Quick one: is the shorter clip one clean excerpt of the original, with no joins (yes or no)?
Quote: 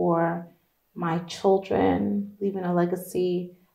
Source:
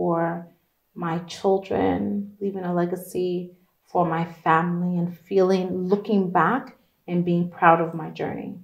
yes